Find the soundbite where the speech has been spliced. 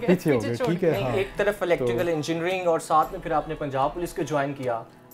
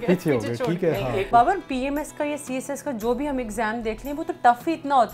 second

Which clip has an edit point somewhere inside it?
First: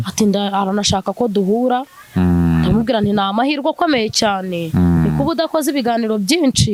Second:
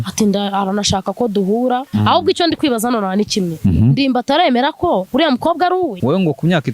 second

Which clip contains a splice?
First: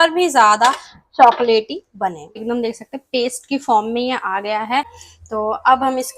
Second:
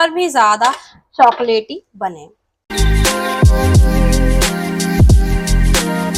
first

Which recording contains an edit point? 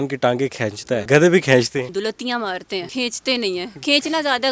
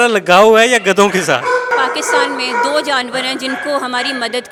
first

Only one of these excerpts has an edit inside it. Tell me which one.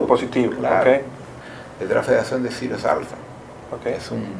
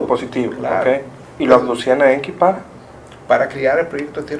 second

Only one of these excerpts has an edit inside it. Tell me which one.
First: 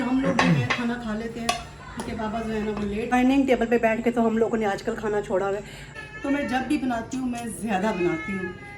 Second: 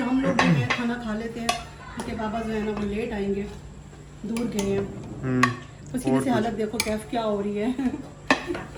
first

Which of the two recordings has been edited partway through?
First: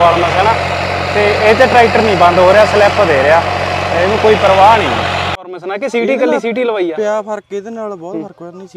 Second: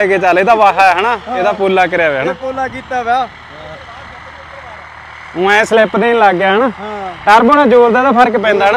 first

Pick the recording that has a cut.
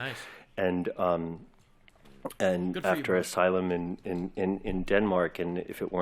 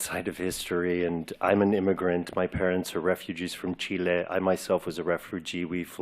second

